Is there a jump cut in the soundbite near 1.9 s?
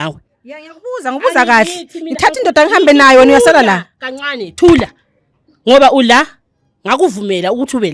no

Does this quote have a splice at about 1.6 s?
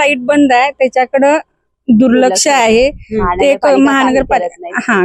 no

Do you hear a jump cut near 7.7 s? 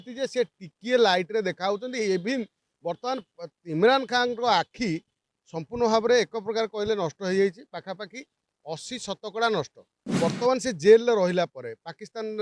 no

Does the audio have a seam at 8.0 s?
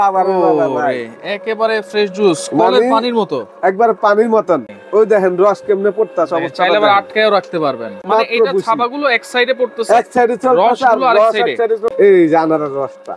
yes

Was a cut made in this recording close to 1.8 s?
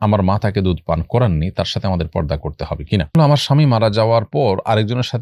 no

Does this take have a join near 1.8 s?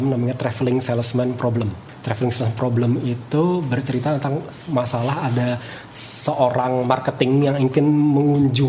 yes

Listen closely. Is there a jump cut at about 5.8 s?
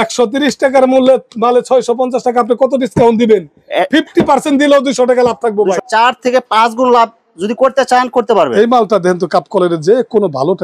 no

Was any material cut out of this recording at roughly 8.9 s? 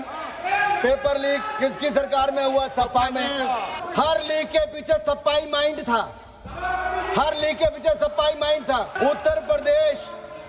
yes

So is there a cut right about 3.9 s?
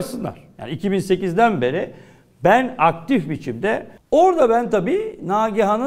yes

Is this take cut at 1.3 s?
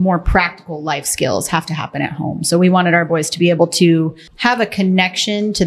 no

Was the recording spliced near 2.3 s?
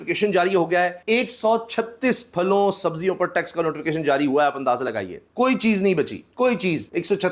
no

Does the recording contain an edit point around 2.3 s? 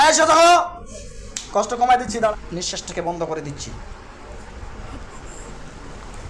yes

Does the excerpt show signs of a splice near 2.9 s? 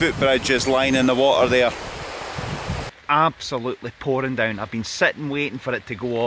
yes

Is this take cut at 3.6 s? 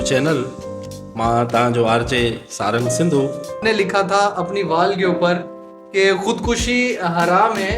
yes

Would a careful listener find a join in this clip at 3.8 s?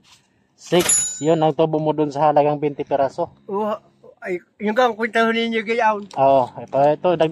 yes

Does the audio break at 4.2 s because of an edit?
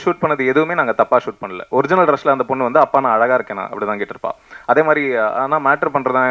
no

